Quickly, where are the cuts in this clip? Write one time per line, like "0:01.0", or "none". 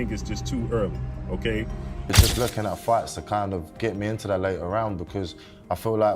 0:02.1